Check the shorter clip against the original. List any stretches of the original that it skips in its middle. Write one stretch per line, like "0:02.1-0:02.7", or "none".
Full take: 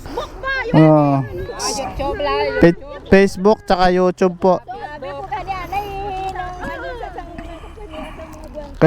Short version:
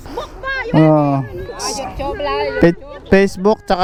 none